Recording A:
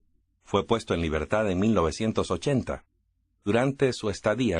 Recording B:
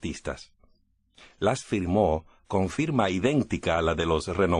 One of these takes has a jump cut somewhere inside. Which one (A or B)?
A